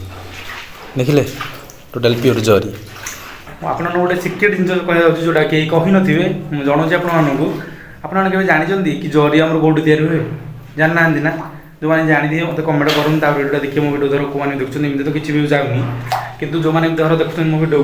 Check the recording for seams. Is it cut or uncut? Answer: cut